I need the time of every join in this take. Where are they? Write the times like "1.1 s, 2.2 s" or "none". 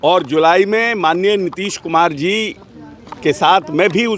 none

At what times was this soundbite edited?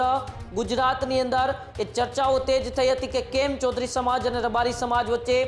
none

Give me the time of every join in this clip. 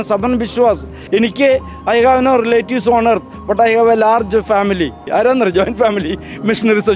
0.9 s, 5.0 s

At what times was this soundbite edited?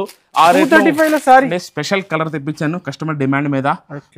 1.6 s

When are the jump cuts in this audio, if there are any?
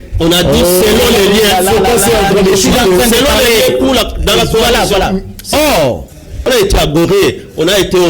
6.3 s

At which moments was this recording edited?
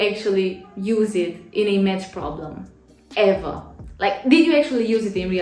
none

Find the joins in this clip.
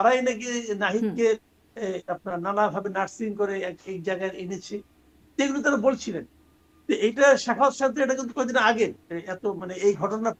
none

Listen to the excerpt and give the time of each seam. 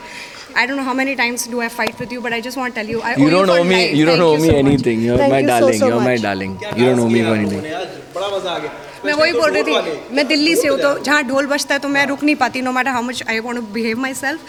none

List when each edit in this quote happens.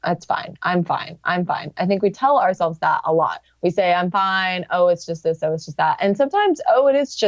3.4 s

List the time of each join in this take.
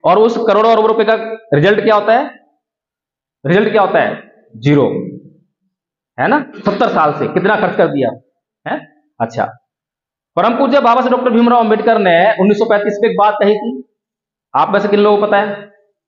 none

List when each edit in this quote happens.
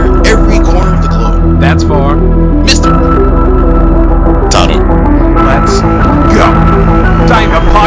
none

